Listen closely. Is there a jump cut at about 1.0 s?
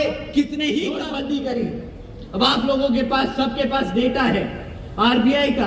yes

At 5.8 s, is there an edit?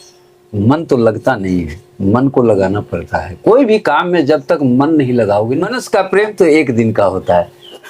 yes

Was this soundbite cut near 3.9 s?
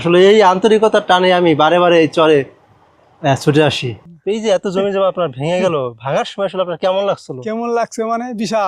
yes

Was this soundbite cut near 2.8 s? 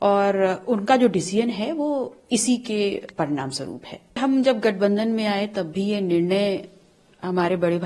no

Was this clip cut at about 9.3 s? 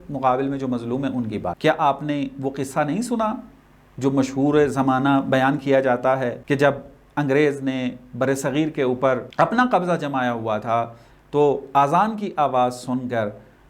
yes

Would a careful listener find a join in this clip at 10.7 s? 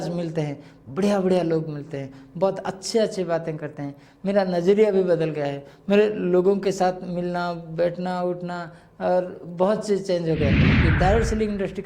yes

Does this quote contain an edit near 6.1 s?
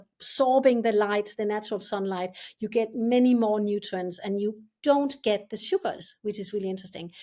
no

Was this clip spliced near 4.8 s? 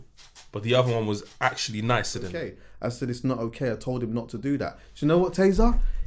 no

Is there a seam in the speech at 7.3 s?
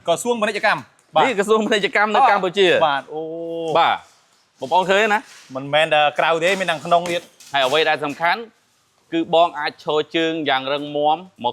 yes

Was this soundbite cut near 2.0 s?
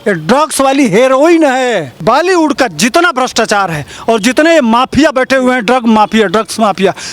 yes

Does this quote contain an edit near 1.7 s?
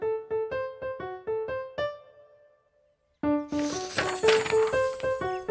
yes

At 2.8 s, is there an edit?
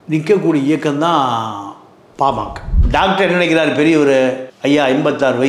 yes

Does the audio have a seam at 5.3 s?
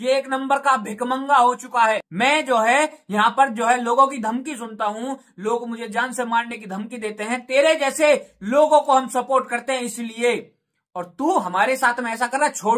no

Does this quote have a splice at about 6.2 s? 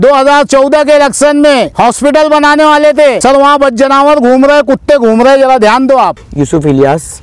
yes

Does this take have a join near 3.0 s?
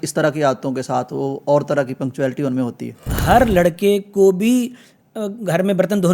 yes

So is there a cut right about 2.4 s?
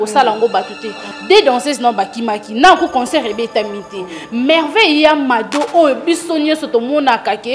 no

